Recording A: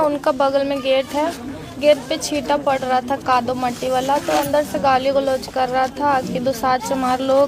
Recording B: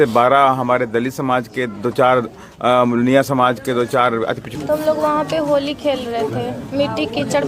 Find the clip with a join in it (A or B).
B